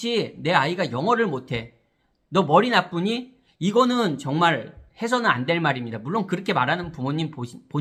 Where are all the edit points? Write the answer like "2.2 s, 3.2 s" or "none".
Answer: none

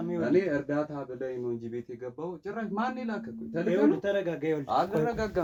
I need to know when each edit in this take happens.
none

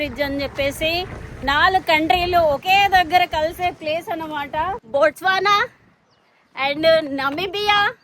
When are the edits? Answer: 1.2 s, 4.7 s

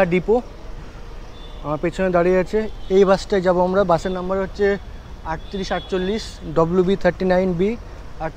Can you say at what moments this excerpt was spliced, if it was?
none

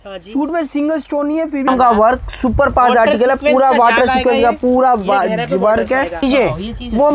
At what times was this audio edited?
1.7 s, 6.2 s

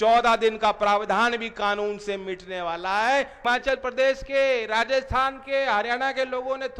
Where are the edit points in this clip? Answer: 3.4 s

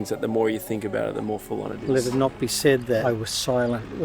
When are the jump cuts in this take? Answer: 1.9 s, 3.0 s

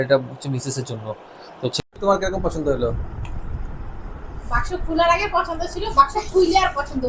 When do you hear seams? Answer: 1.8 s

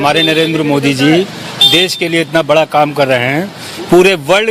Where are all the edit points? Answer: none

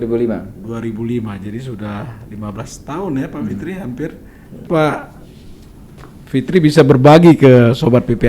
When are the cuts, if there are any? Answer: 4.6 s

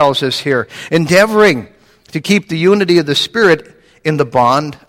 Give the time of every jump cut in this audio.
none

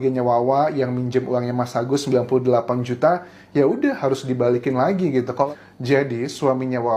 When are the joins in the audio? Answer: 5.5 s

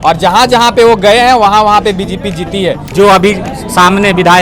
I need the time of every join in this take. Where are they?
2.9 s

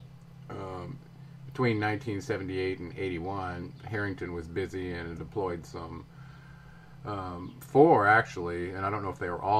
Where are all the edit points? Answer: none

